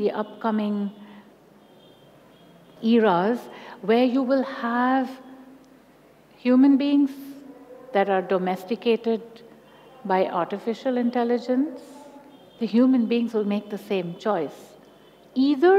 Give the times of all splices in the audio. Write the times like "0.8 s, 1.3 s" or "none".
12.4 s

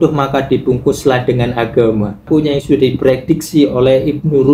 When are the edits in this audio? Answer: 2.2 s

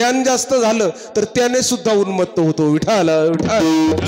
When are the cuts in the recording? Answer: none

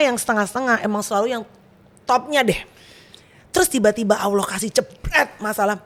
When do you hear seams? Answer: none

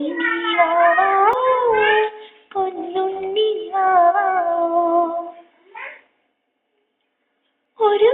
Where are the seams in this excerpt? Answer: 1.4 s

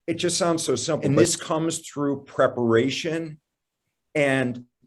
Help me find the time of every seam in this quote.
1.1 s

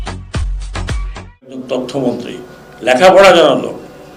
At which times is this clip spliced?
1.6 s

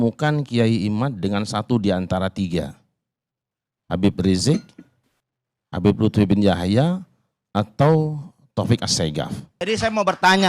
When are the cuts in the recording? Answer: 9.5 s

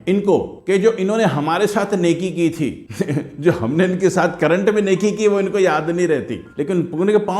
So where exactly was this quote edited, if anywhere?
6.4 s

